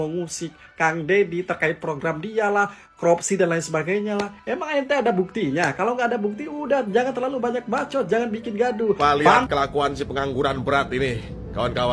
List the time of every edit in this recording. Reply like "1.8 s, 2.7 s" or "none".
9.5 s